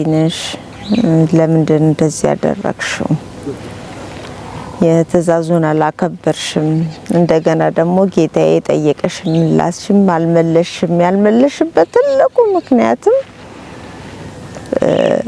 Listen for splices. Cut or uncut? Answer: uncut